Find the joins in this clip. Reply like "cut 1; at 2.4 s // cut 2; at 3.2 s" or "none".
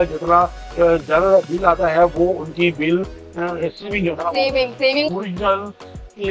cut 1; at 5.0 s